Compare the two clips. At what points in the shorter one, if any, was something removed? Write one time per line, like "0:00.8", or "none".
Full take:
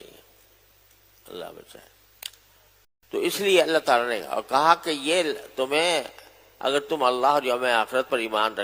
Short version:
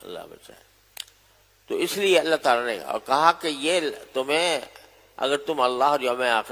0:01.9